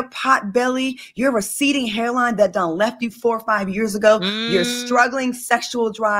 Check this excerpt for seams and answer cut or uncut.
uncut